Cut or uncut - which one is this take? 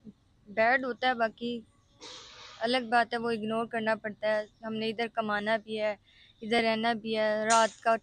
uncut